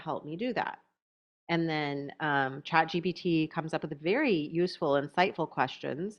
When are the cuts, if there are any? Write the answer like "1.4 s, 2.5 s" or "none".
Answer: none